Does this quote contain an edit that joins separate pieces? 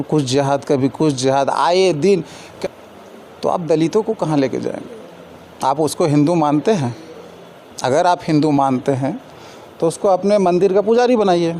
yes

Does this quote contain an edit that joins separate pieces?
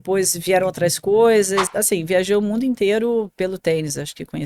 yes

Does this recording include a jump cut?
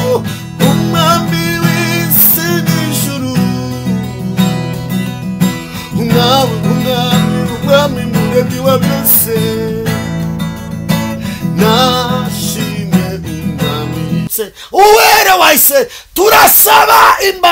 yes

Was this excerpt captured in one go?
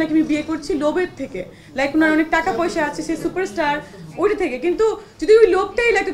yes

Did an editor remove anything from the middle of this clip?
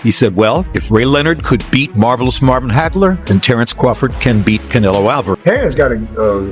yes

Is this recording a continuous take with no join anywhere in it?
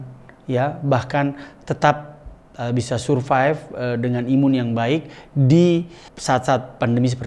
yes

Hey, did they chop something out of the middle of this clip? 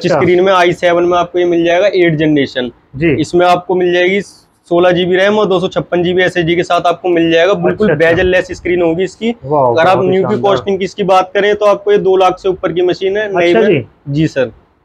no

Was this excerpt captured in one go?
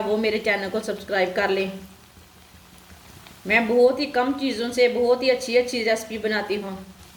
yes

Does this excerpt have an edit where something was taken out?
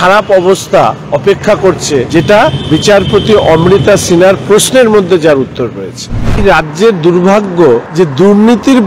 yes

